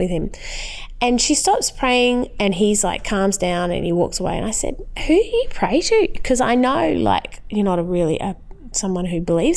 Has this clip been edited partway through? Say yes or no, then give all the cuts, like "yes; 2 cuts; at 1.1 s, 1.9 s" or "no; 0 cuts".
yes; 1 cut; at 7.4 s